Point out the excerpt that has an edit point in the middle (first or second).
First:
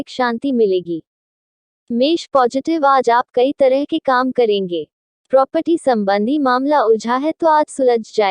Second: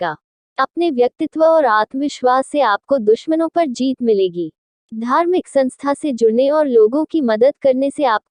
first